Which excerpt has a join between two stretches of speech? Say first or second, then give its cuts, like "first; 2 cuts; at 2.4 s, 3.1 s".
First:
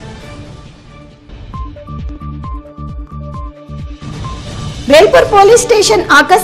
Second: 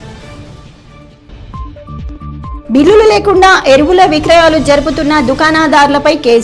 second; 1 cut; at 2.4 s